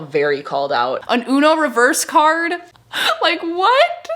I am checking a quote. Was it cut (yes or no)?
yes